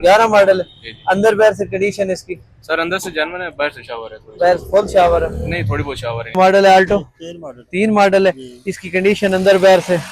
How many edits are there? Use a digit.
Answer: 1